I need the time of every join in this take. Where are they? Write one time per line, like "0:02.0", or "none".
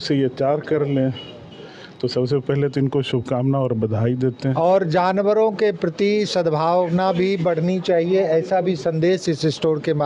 0:04.5